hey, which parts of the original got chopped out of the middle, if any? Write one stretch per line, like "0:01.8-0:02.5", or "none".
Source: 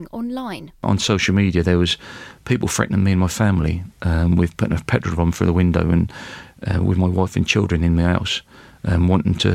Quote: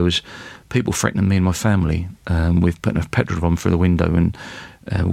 none